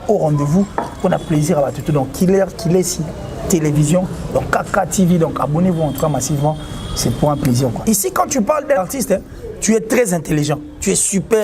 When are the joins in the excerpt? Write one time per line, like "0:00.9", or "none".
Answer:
0:07.8
0:08.8